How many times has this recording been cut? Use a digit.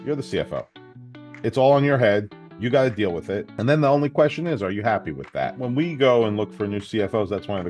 2